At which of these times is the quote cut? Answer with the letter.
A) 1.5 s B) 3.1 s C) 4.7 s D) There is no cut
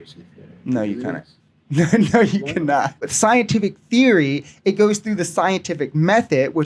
B